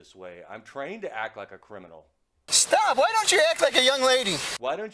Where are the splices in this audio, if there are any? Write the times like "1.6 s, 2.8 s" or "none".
2.5 s